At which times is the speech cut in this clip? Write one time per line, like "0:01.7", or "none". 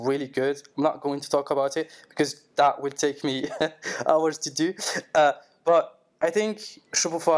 none

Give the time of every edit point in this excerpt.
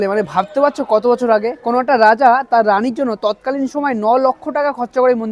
none

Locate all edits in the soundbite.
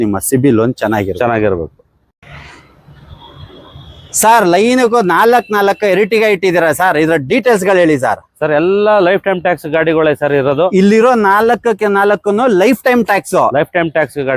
none

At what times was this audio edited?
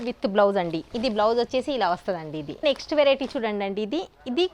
0:02.5

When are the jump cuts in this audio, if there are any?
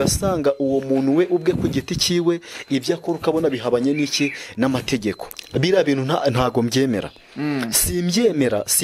0:05.3

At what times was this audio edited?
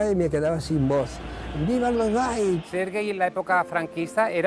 0:02.7

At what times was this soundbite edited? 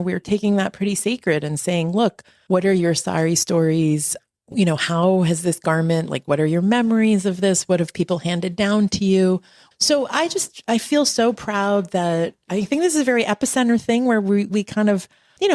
0:02.3
0:09.5

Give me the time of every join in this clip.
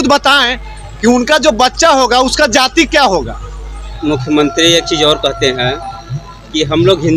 0:03.8

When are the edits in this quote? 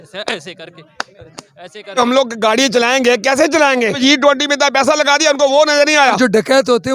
0:02.0
0:04.0
0:06.2

